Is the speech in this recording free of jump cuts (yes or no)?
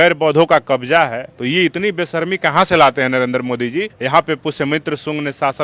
no